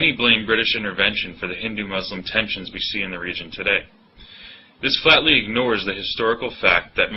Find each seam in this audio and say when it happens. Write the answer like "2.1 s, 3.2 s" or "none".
none